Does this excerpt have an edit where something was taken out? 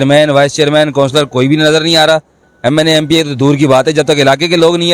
no; 0 cuts

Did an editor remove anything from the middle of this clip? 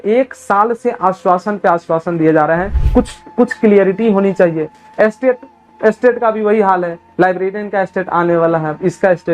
yes; 1 cut; at 2.8 s

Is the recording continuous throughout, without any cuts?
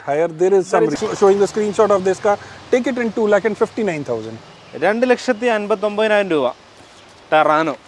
no; 1 cut; at 0.9 s

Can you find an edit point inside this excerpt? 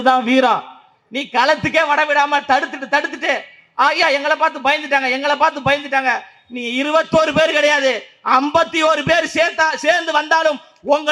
no; 0 cuts

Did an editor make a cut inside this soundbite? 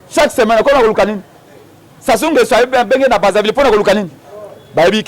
no; 0 cuts

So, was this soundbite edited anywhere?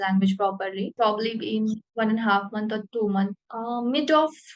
yes; 3 cuts; at 0.9 s, 1.9 s, 3.5 s

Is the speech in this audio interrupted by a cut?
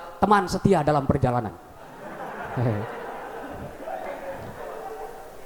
no; 0 cuts

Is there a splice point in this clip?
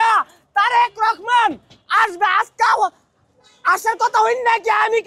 no; 0 cuts

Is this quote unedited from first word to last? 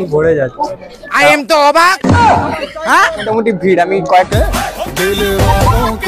no; 2 cuts; at 3.3 s, 4.3 s

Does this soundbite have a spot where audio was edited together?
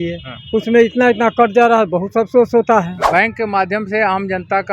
yes; 1 cut; at 3.0 s

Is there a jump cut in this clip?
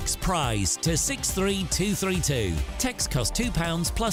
no; 0 cuts

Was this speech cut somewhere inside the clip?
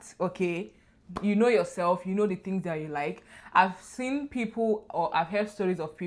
no; 0 cuts

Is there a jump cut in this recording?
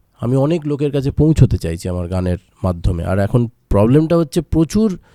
no; 0 cuts

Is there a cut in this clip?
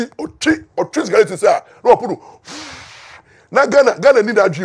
no; 0 cuts

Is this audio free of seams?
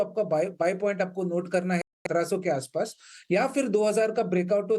yes; 0 cuts

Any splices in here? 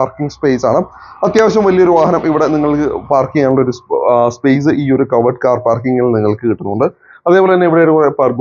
no; 0 cuts

